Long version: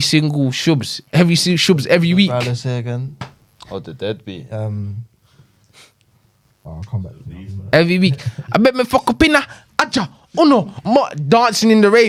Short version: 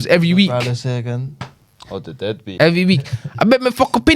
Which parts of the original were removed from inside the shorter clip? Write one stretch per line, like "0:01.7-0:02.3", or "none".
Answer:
0:04.4-0:07.7